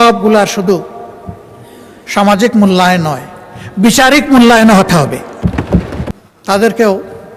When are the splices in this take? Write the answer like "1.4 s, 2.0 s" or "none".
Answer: 6.0 s

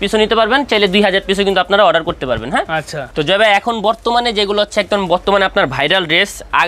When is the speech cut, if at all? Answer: none

